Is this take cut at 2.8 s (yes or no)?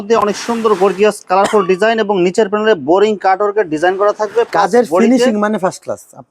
no